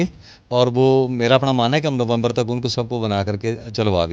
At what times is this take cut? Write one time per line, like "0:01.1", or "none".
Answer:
none